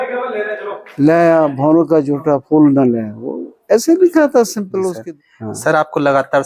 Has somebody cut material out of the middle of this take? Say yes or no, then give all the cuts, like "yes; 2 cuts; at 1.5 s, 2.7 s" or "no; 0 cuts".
yes; 1 cut; at 4.9 s